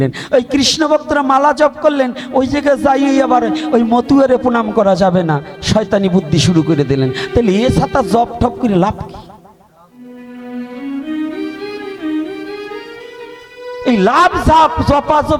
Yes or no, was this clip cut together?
no